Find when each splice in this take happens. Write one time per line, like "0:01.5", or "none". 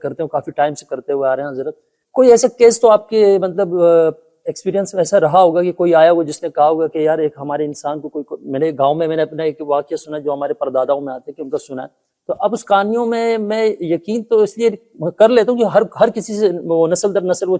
none